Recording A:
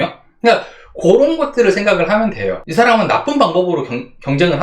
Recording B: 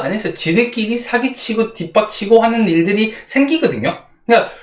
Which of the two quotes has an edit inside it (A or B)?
A